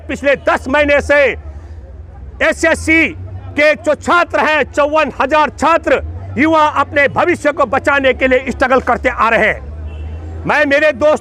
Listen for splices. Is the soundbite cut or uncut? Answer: uncut